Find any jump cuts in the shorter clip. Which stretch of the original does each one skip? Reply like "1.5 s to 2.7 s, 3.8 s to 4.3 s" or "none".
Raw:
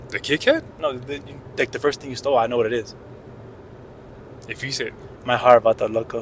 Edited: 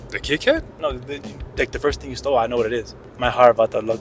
3.0 s to 5.1 s